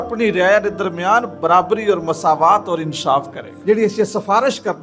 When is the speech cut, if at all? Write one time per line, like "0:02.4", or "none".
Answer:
0:03.5